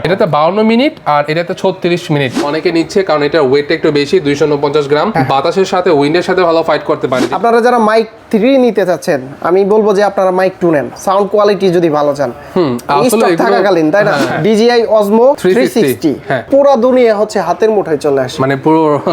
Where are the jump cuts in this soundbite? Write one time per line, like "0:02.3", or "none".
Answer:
0:02.4
0:07.3
0:14.3